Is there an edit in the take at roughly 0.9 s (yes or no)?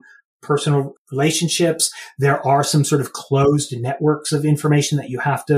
yes